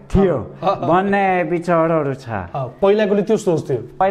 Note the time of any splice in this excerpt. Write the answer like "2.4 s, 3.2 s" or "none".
none